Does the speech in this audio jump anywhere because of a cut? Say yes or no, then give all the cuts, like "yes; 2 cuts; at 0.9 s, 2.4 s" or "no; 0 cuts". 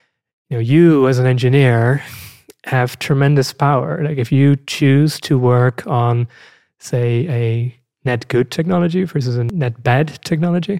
yes; 1 cut; at 9.5 s